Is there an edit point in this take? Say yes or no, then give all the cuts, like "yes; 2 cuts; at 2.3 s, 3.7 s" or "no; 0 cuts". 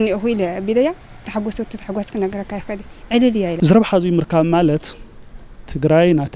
yes; 1 cut; at 3.5 s